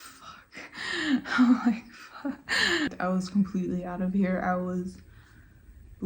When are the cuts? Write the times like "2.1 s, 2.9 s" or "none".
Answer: 2.9 s